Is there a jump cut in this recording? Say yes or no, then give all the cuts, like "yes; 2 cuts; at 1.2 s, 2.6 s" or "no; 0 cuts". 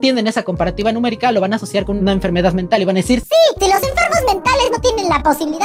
no; 0 cuts